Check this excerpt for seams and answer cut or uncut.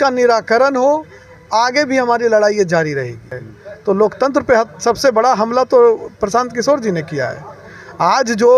cut